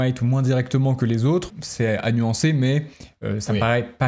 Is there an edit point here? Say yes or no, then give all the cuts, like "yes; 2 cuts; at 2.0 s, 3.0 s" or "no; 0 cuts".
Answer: yes; 1 cut; at 1.5 s